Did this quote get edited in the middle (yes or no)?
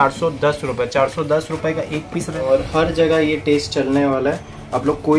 yes